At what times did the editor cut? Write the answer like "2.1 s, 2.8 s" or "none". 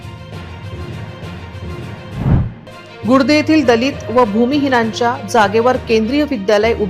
2.0 s

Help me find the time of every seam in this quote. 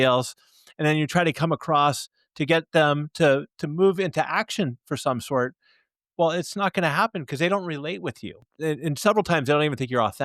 8.4 s

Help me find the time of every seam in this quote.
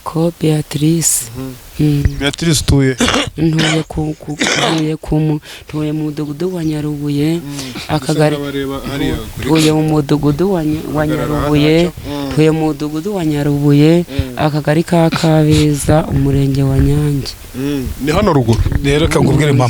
none

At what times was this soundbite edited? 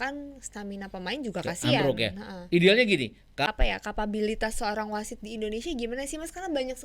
3.4 s

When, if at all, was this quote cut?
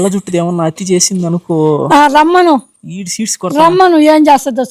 none

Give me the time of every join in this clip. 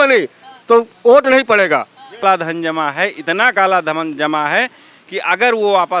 2.2 s

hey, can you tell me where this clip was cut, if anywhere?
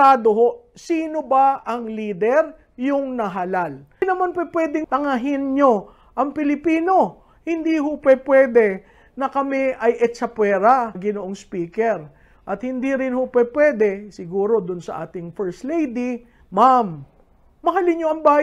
4.0 s

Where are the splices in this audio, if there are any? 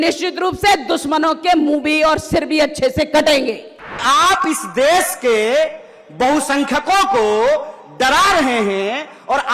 4.0 s

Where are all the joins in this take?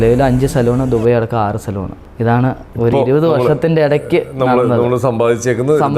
2.3 s

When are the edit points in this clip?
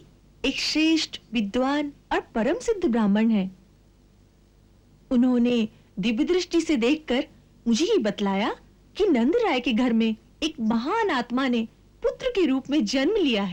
none

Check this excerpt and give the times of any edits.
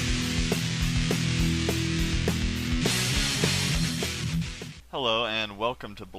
1.3 s

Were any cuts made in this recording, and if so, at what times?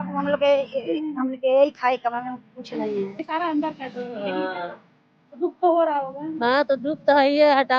3.2 s

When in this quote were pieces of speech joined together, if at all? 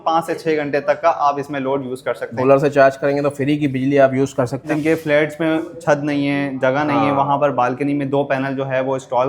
2.3 s, 4.7 s

